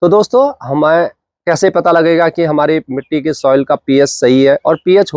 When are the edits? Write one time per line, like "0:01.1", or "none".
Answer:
none